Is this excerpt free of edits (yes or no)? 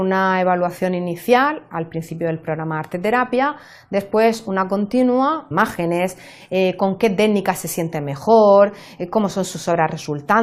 yes